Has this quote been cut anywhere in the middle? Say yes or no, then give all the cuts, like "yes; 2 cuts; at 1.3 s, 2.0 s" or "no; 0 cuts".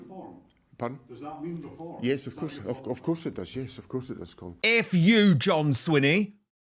yes; 1 cut; at 4.4 s